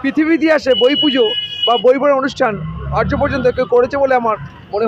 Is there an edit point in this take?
no; 0 cuts

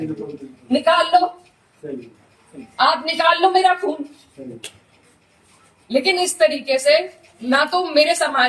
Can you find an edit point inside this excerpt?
no; 0 cuts

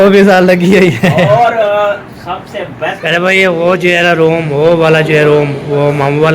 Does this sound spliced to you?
yes; 1 cut; at 3.0 s

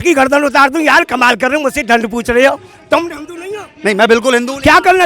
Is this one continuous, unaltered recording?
yes; 0 cuts

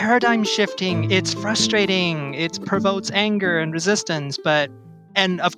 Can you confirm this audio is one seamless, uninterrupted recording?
no; 1 cut; at 1.0 s

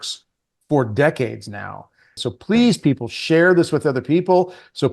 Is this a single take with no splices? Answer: no; 1 cut; at 2.2 s

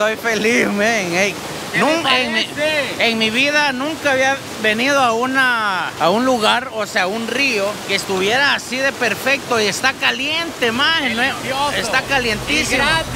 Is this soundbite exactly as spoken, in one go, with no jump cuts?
yes; 0 cuts

